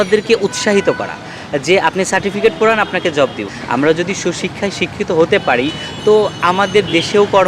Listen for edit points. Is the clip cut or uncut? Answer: uncut